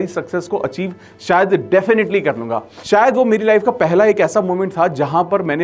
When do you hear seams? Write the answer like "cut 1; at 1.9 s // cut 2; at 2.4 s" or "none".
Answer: cut 1; at 2.7 s